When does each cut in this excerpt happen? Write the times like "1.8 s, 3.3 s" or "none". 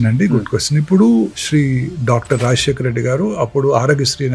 1.4 s

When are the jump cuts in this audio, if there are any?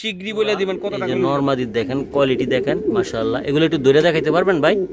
0.9 s

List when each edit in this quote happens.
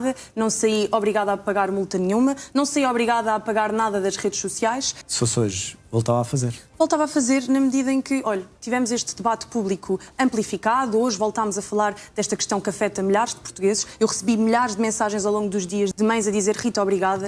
5.0 s, 15.9 s

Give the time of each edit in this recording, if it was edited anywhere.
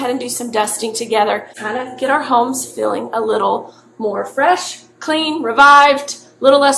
1.5 s

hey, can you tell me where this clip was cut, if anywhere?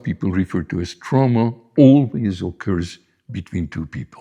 none

